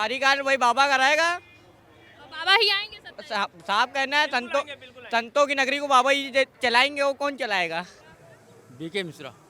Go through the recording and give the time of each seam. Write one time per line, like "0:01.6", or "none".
none